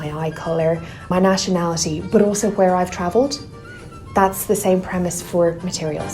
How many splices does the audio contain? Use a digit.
1